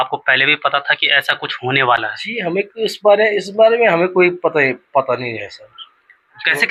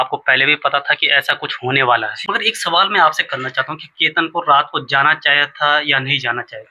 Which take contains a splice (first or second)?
second